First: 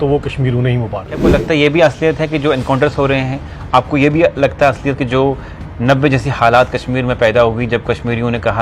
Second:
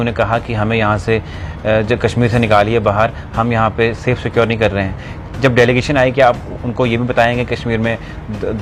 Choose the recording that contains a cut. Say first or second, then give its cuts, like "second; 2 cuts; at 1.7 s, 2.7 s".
first; 1 cut; at 1.2 s